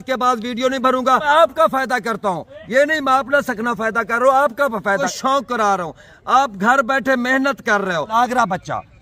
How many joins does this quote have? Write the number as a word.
three